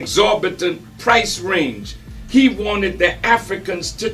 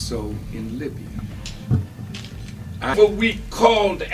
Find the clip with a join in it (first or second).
second